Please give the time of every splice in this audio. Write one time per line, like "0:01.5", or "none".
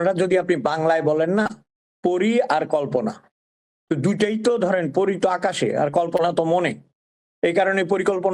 none